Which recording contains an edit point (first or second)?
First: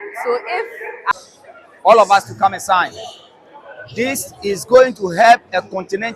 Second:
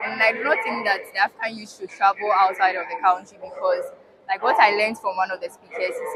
first